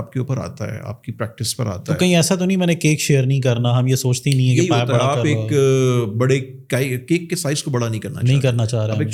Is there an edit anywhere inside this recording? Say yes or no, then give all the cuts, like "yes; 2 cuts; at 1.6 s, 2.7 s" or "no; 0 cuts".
no; 0 cuts